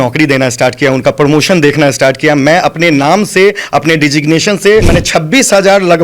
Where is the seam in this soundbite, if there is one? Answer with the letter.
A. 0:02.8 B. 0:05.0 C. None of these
B